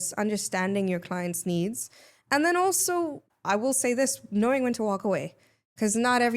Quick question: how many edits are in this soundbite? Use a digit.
1